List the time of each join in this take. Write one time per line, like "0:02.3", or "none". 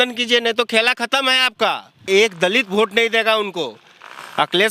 0:02.1